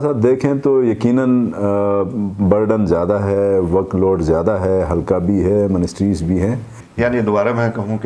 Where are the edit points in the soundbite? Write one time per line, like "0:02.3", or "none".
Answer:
0:06.8